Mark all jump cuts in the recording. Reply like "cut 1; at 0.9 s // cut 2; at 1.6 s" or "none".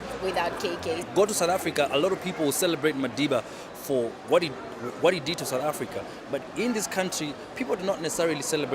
none

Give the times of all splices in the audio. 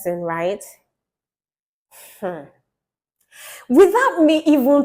none

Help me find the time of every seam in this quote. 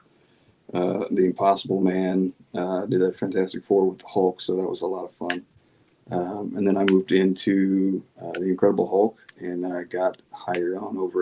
none

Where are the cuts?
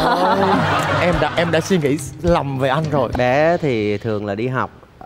cut 1; at 3.1 s

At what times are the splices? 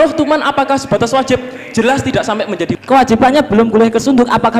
cut 1; at 2.7 s

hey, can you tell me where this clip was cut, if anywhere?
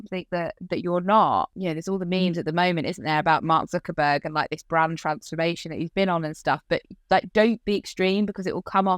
cut 1; at 1.5 s

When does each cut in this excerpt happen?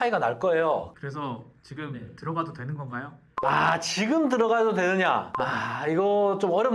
cut 1; at 0.9 s

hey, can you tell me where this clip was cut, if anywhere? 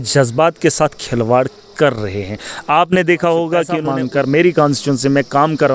cut 1; at 3.8 s

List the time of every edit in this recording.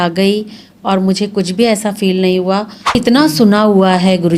cut 1; at 3.0 s

